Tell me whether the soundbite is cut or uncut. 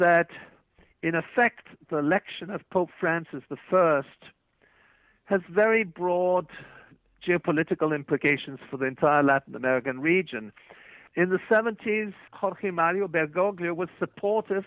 cut